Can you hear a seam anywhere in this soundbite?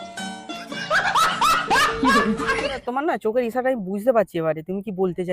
yes; 1 cut; at 2.8 s

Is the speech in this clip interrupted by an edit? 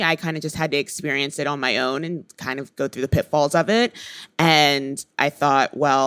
no; 0 cuts

